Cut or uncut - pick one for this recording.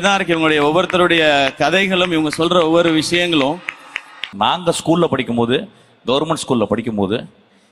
cut